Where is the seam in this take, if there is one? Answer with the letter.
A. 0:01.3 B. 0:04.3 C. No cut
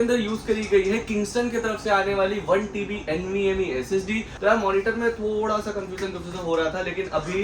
B